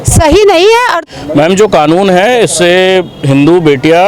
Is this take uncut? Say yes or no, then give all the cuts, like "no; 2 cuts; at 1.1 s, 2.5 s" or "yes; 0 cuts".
no; 1 cut; at 1.0 s